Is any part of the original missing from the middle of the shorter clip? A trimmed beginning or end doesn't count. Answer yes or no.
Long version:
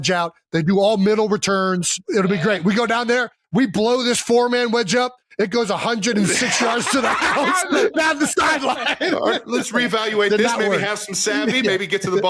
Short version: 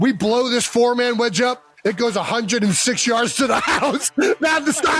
no